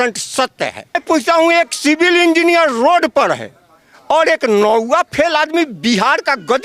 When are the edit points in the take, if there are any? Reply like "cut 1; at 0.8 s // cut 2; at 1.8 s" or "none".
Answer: cut 1; at 1.0 s